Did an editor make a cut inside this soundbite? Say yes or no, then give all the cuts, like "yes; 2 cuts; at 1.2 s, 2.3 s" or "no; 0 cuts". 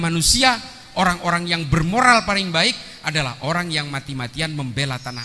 no; 0 cuts